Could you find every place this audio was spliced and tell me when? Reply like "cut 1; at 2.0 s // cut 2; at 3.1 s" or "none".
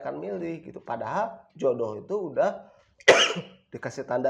none